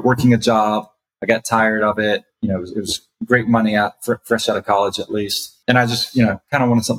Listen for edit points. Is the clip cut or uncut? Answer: cut